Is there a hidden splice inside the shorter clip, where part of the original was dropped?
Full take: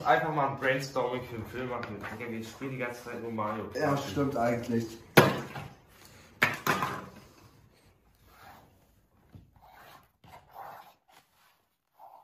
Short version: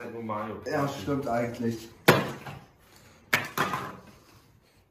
no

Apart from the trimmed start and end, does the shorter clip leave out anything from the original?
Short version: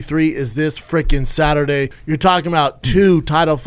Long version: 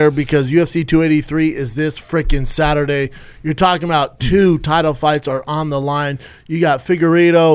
yes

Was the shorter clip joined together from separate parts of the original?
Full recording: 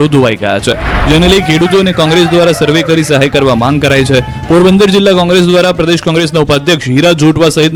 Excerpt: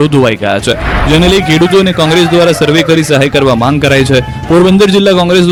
no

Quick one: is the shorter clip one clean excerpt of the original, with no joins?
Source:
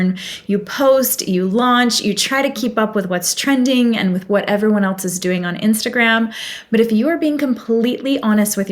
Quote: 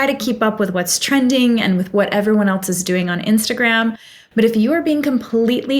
yes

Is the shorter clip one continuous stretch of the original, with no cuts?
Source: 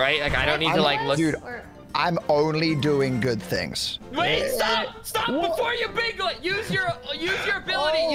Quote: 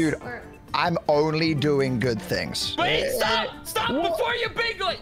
no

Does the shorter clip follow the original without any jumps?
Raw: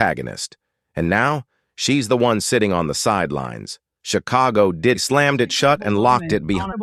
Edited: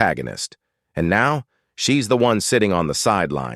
yes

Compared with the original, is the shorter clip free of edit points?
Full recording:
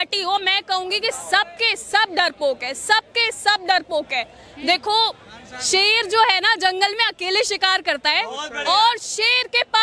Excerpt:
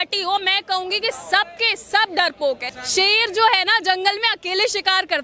no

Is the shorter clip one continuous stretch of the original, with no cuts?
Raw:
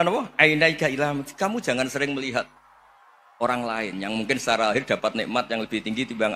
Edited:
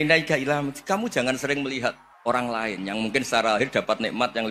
no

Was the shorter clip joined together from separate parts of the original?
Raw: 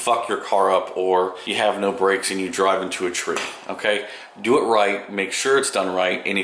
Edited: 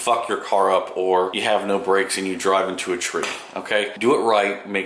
yes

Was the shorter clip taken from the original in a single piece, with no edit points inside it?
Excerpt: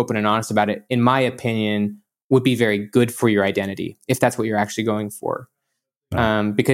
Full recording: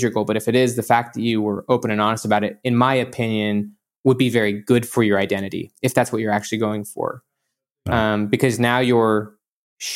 yes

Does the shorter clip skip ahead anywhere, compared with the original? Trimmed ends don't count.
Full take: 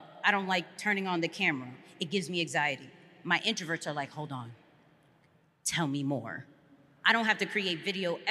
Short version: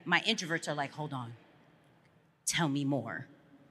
no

